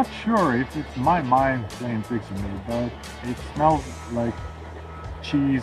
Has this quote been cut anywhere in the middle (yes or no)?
no